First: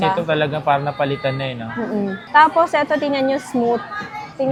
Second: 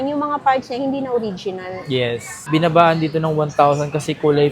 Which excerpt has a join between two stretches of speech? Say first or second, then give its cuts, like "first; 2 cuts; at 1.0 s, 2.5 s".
second; 1 cut; at 2.5 s